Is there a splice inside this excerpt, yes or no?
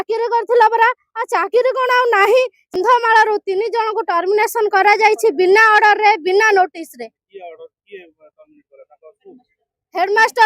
yes